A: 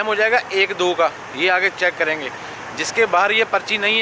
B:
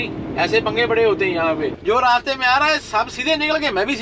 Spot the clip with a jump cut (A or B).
B